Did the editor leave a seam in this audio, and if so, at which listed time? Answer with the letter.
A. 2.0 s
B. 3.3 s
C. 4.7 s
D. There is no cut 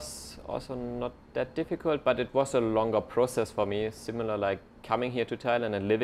D